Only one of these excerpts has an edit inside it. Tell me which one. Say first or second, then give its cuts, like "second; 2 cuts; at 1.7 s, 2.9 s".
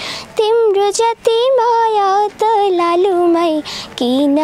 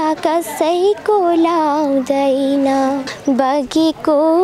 second; 1 cut; at 3.1 s